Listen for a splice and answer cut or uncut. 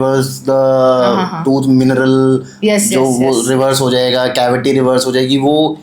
uncut